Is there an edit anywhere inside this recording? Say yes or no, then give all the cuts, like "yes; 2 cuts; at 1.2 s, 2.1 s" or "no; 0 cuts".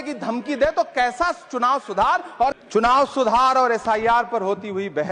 yes; 1 cut; at 2.6 s